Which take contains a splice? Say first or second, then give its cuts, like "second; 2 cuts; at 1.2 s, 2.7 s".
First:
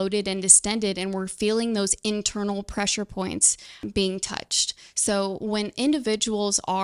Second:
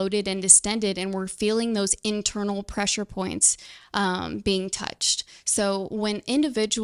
first; 1 cut; at 3.8 s